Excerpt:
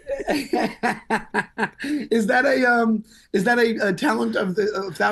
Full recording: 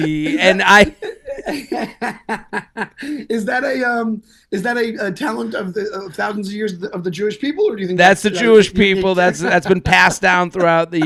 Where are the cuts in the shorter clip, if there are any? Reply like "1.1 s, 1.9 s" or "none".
none

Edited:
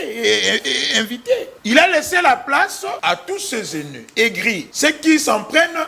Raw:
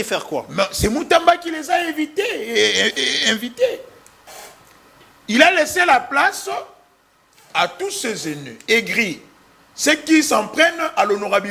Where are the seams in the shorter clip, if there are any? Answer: 1.5 s, 3.0 s, 4.7 s

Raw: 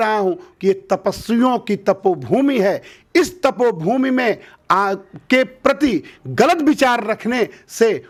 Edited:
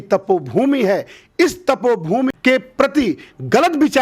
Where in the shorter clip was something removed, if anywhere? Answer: 2.3 s

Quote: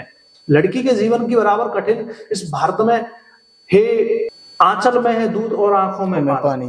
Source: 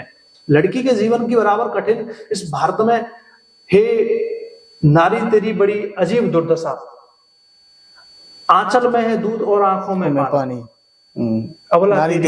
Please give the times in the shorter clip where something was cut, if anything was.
4.4 s

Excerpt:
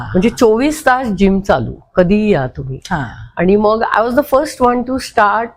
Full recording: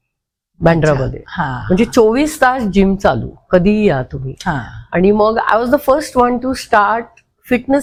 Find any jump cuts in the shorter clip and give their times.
none

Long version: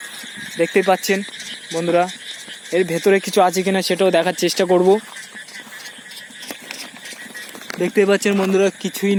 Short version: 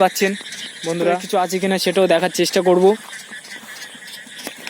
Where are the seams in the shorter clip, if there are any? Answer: 1.2 s

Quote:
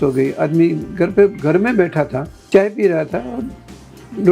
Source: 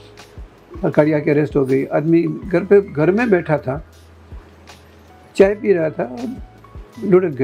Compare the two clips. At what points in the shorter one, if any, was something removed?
2.3 s

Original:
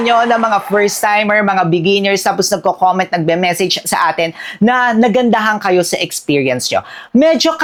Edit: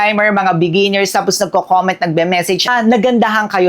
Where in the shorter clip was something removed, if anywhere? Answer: 2.7 s

